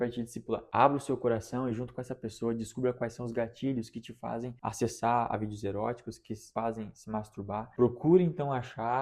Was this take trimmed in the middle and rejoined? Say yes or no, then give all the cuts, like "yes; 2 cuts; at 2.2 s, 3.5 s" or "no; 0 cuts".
yes; 2 cuts; at 4.5 s, 6.4 s